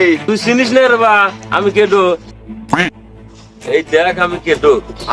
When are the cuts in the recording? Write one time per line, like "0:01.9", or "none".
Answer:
none